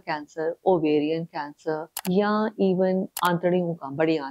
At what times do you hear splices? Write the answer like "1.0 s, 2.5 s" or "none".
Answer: 1.9 s, 3.1 s

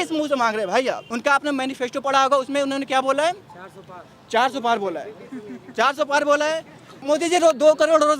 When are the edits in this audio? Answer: 1.1 s, 7.0 s

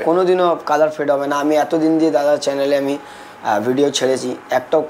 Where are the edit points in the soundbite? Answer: none

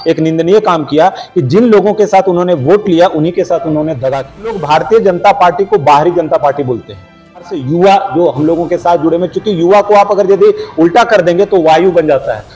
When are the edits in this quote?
4.6 s, 7.4 s

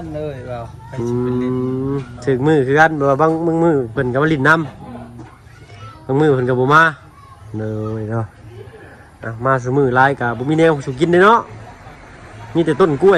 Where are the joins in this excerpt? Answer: none

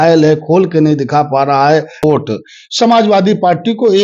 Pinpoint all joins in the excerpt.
2.0 s

